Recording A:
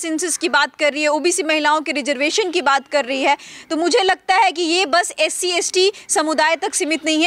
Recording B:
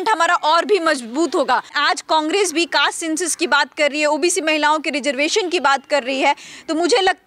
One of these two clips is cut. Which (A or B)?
B